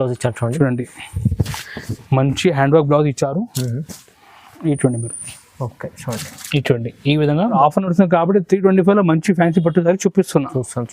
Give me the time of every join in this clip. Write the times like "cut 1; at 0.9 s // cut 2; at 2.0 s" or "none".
cut 1; at 7.6 s